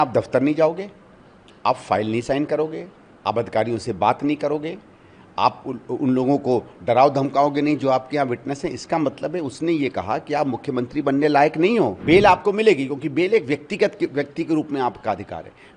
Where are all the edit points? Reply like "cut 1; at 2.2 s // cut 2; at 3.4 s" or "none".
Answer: cut 1; at 12.0 s